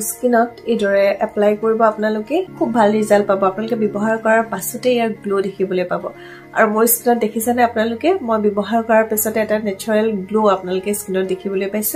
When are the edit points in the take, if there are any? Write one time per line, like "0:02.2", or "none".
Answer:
0:02.5